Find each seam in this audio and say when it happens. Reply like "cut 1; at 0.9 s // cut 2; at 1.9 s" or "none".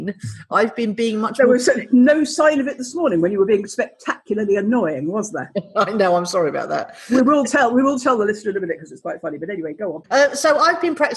cut 1; at 10.0 s